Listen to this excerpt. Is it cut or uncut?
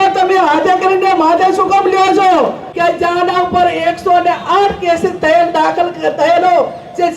cut